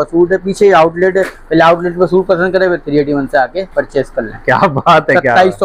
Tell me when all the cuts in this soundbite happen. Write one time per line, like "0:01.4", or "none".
none